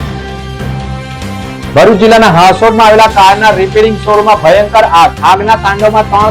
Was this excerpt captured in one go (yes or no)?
no